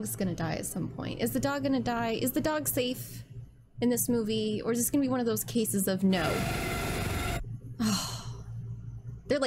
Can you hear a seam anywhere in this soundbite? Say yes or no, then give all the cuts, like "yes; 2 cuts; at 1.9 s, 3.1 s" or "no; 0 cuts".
yes; 1 cut; at 6.4 s